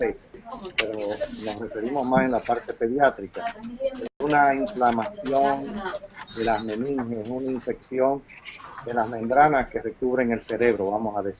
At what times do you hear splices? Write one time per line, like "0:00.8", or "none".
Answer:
none